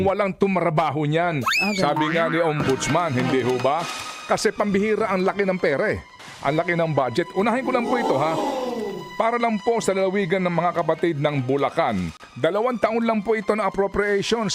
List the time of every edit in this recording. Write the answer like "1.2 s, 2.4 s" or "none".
none